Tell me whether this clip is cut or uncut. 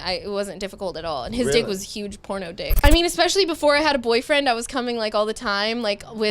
cut